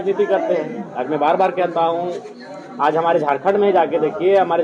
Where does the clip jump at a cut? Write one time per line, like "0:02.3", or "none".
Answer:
none